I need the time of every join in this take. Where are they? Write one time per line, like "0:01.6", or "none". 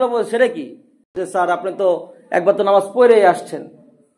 0:01.1